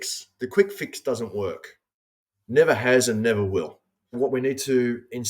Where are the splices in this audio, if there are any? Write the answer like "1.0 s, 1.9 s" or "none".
4.2 s